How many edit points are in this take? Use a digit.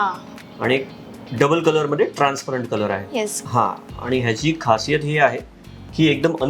1